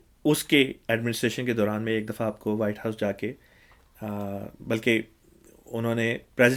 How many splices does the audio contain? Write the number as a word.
zero